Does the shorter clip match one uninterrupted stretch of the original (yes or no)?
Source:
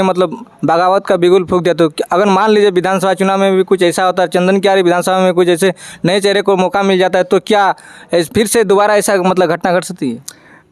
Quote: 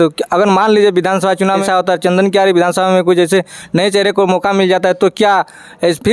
no